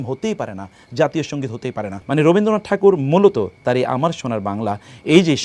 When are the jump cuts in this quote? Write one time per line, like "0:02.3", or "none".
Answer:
0:02.0